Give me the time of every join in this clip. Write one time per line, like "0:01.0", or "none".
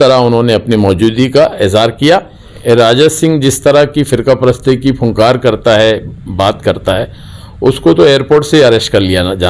0:02.5